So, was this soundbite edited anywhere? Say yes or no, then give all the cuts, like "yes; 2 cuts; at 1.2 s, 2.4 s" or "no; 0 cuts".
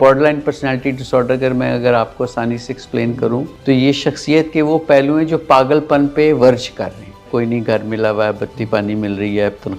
yes; 2 cuts; at 3.5 s, 7.3 s